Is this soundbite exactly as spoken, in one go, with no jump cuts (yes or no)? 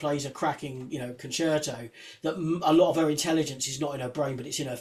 yes